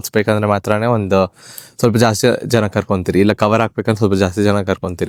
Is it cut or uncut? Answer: uncut